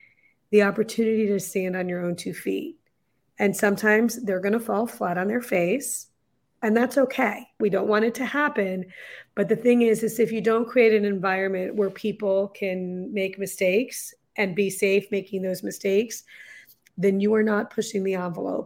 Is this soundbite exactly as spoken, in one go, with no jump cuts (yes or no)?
no